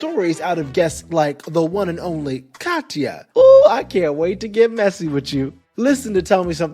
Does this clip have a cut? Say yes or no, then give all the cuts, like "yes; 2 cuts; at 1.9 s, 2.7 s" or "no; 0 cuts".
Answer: yes; 1 cut; at 3.2 s